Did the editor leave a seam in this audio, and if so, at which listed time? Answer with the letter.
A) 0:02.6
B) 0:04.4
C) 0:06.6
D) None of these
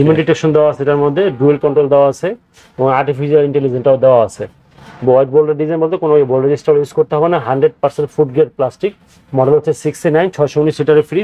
D